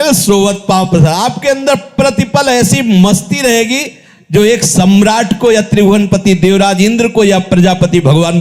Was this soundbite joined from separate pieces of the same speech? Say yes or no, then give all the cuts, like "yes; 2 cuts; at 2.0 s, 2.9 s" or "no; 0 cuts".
no; 0 cuts